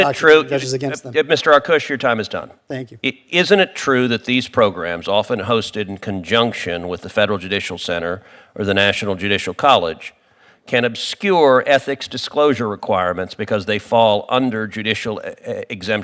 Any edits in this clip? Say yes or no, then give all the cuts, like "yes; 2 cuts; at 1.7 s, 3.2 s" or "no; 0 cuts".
no; 0 cuts